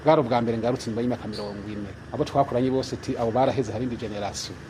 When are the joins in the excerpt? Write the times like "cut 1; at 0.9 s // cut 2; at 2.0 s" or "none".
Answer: cut 1; at 2.0 s